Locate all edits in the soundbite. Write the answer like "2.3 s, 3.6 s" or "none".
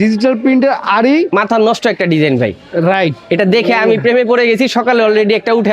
none